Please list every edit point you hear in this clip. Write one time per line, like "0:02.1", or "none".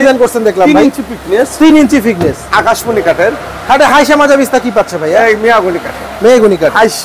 none